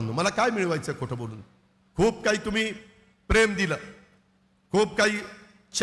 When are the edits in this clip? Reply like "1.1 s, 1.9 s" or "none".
none